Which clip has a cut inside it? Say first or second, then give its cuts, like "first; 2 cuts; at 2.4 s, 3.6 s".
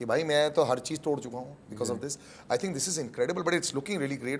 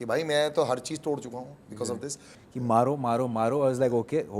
second; 1 cut; at 2.3 s